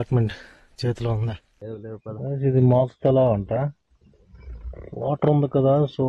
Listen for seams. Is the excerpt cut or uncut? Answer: cut